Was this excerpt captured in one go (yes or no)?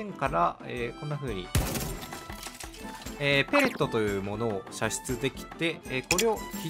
yes